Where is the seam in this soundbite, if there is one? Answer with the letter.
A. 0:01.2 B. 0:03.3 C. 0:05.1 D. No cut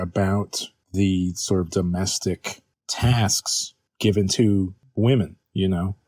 C